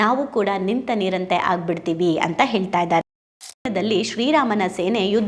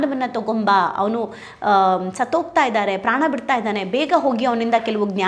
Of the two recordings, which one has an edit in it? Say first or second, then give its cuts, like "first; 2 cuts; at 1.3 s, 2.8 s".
first; 1 cut; at 3.6 s